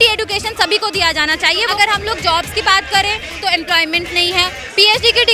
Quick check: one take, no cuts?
no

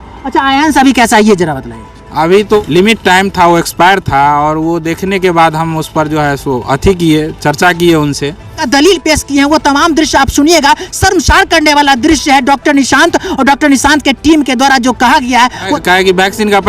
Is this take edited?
yes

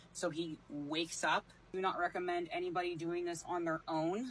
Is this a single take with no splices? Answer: no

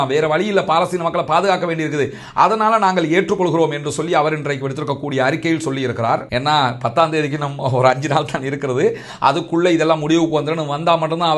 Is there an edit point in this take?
yes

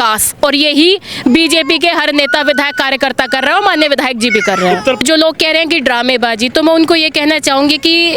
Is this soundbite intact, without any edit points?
no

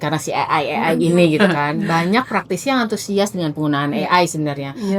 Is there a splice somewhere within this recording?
no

